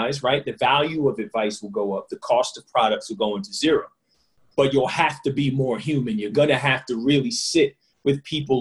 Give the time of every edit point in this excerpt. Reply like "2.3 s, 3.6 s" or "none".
none

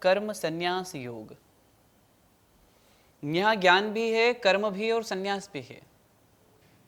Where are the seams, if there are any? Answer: none

